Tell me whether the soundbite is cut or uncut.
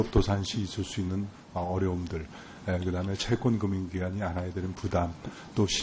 cut